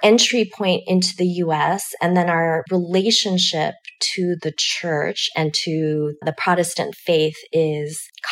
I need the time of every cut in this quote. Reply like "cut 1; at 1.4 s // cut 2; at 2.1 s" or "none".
cut 1; at 6.2 s